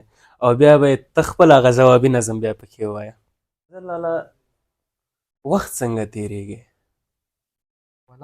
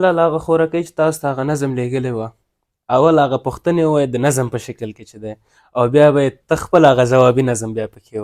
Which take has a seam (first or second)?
first